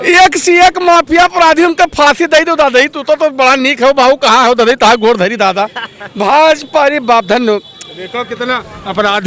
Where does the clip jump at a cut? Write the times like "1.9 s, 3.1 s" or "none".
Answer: none